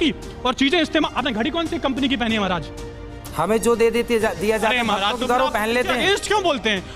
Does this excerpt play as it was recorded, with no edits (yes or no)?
yes